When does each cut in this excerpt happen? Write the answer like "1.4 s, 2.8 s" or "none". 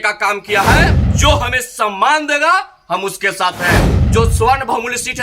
1.0 s, 4.0 s